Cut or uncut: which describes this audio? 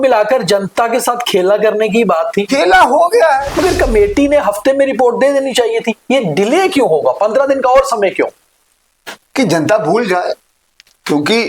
cut